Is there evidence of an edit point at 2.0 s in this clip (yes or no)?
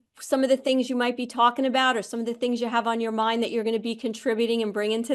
no